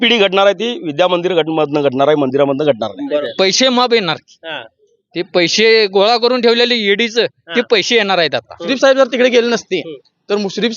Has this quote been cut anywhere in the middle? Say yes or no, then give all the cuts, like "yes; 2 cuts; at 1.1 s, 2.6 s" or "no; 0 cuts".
yes; 2 cuts; at 3.2 s, 8.7 s